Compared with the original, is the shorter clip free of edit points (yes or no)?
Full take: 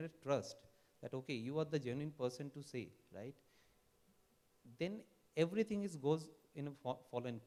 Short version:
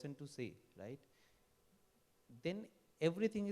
yes